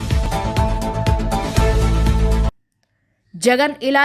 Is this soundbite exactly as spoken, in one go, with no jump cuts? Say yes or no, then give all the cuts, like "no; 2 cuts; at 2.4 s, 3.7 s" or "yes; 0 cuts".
no; 1 cut; at 2.5 s